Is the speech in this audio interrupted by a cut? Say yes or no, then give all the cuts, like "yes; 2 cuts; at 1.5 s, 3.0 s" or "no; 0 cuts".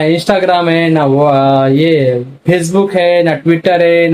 no; 0 cuts